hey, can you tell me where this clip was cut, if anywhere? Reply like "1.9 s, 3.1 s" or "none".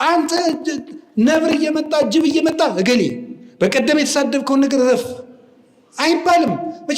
none